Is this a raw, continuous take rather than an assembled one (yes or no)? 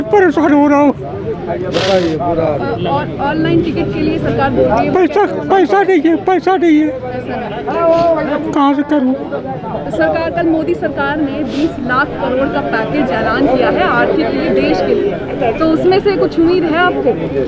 yes